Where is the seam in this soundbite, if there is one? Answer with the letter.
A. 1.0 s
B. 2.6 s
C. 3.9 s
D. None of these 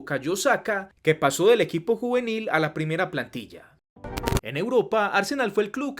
C